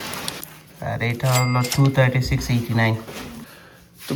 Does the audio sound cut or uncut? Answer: uncut